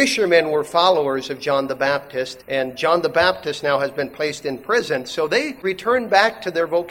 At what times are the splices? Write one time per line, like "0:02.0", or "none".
0:02.3
0:05.6